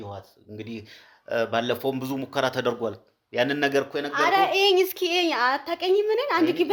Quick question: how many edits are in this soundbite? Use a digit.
0